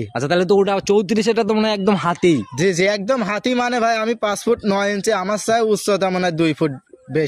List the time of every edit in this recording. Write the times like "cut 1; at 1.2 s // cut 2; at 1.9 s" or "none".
none